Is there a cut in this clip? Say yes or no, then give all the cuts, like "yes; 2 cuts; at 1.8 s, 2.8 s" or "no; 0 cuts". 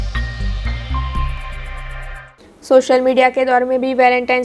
yes; 1 cut; at 2.1 s